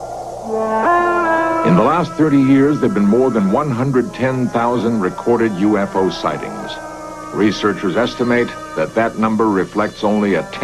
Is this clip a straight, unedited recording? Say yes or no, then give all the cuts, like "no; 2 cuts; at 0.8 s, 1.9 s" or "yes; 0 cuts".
no; 1 cut; at 1.8 s